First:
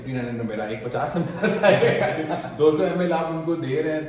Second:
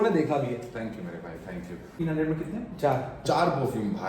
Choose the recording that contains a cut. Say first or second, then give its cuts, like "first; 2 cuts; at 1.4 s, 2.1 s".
second; 1 cut; at 1.9 s